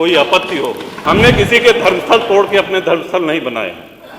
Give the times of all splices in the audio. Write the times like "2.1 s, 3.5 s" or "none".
0.9 s